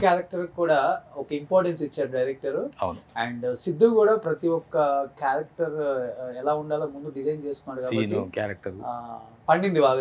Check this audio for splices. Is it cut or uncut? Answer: uncut